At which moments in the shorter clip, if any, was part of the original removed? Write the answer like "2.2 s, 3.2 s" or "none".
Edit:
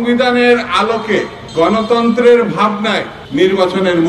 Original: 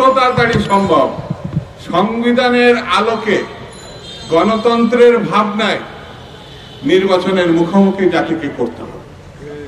1.4 s, 3.2 s